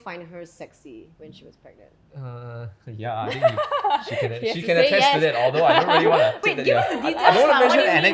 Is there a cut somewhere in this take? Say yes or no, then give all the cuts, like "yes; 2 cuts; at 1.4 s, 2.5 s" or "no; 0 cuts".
yes; 2 cuts; at 1.1 s, 6.4 s